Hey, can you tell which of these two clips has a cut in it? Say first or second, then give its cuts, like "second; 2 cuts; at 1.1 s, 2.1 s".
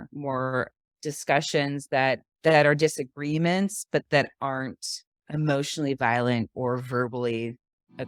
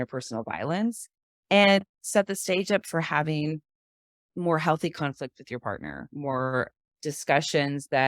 second; 1 cut; at 2.0 s